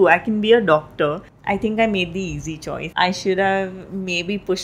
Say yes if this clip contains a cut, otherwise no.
yes